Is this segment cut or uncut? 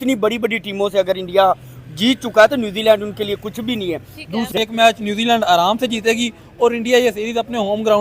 cut